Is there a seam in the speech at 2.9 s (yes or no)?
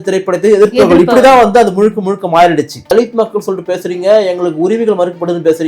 yes